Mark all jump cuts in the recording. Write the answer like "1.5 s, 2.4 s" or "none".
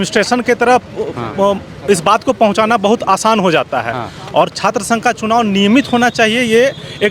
none